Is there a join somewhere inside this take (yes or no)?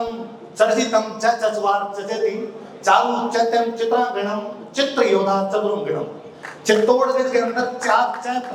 no